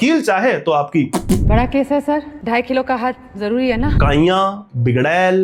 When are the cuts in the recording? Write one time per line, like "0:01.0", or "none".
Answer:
0:01.5
0:03.9